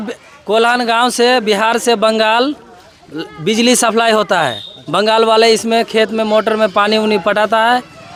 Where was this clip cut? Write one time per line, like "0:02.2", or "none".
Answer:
none